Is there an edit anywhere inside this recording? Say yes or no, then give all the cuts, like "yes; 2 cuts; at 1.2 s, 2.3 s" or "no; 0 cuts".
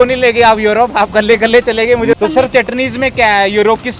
yes; 1 cut; at 2.1 s